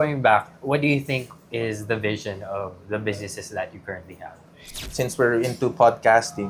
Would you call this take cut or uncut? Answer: cut